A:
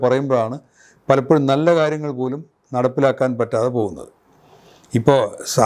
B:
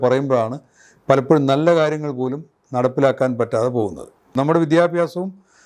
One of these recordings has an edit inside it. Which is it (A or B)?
B